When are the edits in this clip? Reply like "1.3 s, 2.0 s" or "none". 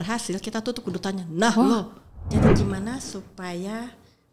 2.3 s